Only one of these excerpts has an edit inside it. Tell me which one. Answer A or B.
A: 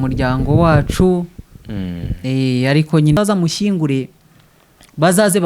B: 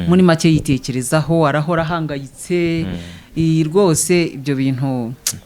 A